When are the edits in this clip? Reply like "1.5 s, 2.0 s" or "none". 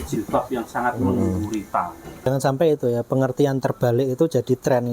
2.3 s